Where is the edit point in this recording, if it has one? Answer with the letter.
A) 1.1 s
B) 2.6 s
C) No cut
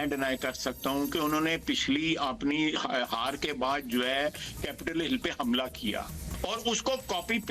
C